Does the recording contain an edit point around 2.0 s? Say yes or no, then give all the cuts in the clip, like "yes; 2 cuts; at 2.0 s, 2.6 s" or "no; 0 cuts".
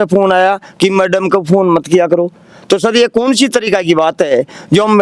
no; 0 cuts